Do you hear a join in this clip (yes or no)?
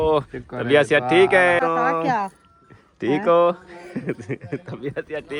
yes